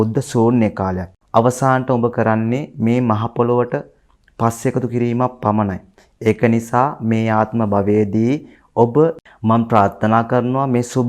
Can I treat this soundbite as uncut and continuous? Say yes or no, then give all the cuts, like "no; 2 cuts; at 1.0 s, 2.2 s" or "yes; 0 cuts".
no; 2 cuts; at 1.1 s, 9.2 s